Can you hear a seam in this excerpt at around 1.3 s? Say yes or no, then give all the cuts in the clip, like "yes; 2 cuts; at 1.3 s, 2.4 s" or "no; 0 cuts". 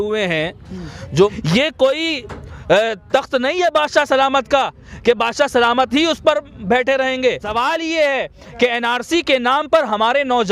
yes; 2 cuts; at 1.3 s, 7.5 s